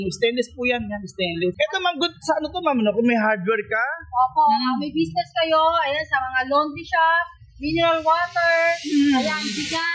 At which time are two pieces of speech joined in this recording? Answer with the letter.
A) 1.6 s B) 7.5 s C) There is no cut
A